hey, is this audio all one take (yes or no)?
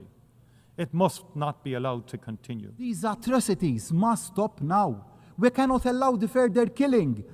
no